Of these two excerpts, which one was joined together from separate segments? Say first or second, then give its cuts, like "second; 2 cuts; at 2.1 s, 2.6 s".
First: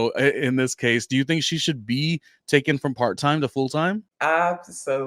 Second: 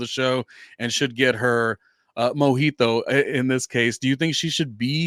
first; 1 cut; at 4.1 s